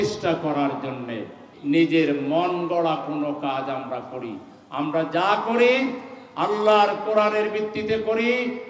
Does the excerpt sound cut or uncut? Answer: cut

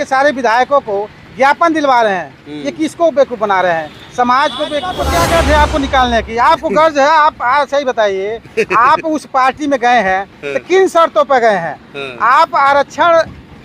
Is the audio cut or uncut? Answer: cut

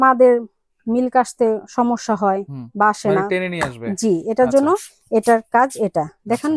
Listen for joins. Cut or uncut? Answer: uncut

